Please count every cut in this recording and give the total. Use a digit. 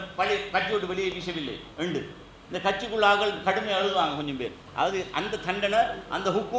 1